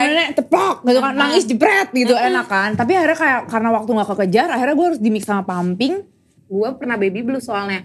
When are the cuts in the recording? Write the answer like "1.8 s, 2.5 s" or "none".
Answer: 6.3 s